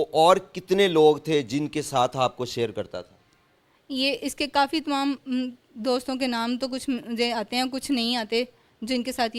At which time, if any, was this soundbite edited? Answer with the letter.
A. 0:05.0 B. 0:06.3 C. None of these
C